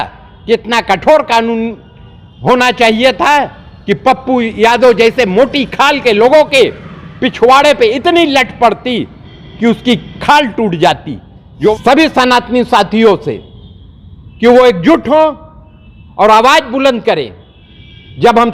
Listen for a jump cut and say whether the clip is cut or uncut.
cut